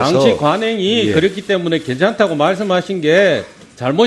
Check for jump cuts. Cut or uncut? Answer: cut